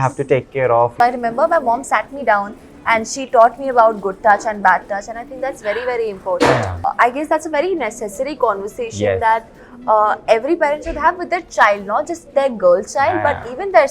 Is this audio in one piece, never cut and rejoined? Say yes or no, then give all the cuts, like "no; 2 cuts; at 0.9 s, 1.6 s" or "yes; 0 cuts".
no; 2 cuts; at 0.9 s, 6.8 s